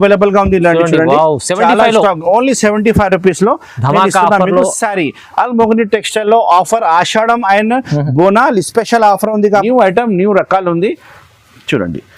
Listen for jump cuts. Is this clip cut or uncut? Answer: cut